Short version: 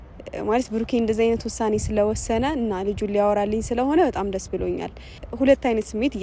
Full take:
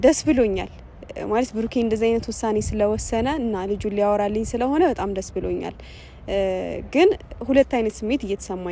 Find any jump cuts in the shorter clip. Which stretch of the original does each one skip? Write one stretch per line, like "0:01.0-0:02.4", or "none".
0:06.0-0:07.3